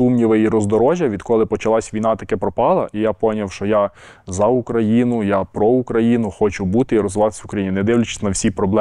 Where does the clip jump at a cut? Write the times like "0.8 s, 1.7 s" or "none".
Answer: none